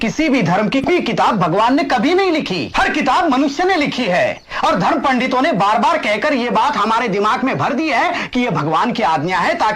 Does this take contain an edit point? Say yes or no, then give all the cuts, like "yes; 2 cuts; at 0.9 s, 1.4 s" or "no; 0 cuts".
yes; 2 cuts; at 0.9 s, 2.6 s